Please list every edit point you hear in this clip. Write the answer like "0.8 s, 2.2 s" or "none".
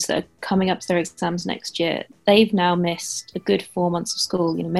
none